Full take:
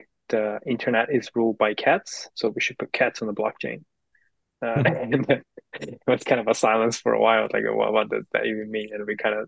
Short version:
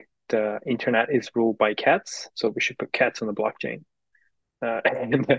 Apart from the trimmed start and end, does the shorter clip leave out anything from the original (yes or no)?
no